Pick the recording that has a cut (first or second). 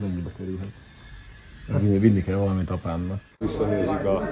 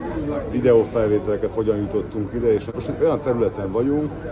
first